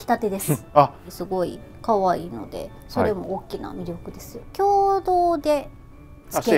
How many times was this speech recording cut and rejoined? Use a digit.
2